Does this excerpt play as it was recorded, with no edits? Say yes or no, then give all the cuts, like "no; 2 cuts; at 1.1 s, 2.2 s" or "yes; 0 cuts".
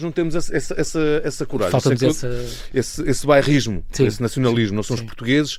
yes; 0 cuts